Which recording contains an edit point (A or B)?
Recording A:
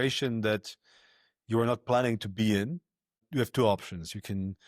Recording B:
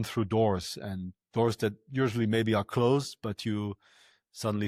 A